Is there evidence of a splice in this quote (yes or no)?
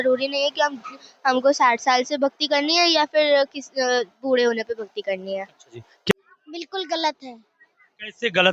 yes